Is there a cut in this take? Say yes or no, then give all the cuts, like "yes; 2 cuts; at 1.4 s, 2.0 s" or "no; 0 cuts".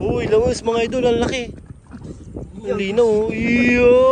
no; 0 cuts